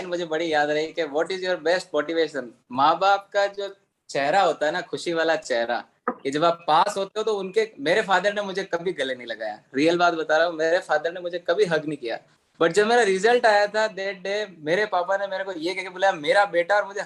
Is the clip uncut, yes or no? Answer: yes